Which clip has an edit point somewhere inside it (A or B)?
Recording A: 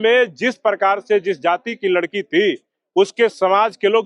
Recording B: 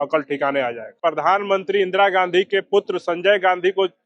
B